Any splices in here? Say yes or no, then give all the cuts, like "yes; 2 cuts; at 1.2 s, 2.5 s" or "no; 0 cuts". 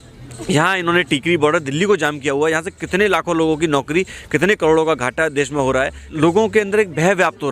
yes; 1 cut; at 6.0 s